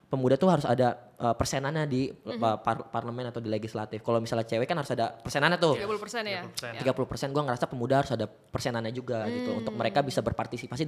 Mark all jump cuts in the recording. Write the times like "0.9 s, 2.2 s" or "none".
none